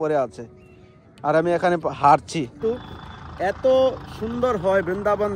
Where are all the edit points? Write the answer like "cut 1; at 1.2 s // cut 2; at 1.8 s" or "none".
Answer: cut 1; at 2.5 s